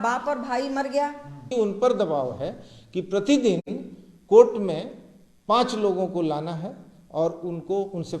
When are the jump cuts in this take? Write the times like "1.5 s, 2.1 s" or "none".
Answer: 1.5 s